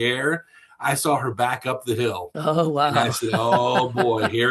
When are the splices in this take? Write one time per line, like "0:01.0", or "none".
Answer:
none